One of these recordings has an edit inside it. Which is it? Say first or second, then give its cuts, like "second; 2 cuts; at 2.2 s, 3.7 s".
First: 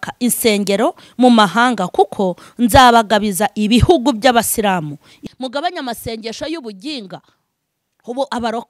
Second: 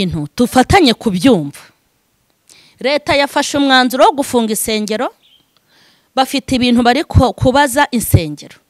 first; 1 cut; at 5.2 s